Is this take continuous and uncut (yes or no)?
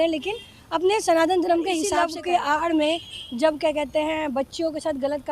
no